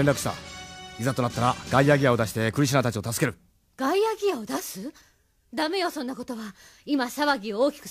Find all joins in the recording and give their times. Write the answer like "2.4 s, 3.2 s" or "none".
2.5 s